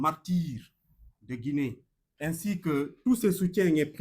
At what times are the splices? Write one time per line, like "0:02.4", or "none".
0:02.4